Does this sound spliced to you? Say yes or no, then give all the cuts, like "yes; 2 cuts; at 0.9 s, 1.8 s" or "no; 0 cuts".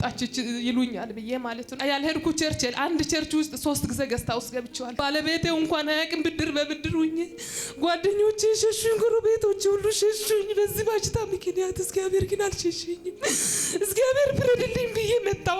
yes; 2 cuts; at 1.8 s, 4.9 s